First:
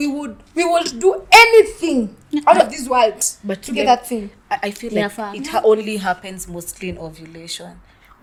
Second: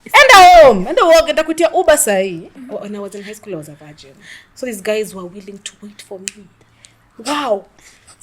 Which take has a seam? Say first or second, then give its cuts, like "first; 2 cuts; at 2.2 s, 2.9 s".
second; 1 cut; at 2.5 s